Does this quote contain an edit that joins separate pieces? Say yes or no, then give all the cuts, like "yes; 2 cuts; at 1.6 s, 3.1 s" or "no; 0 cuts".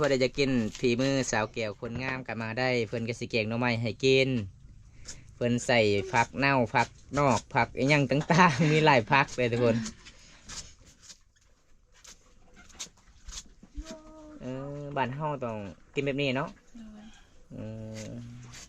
no; 0 cuts